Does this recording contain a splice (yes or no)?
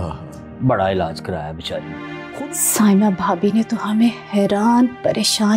yes